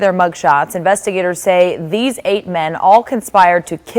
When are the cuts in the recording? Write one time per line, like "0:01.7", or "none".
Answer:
none